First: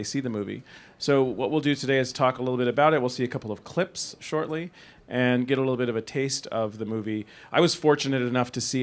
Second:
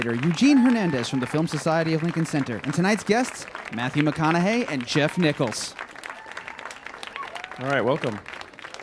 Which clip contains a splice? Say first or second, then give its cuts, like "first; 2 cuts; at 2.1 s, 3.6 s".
first; 1 cut; at 5.8 s